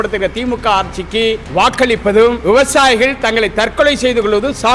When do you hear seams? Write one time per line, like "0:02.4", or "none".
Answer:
0:01.4
0:02.4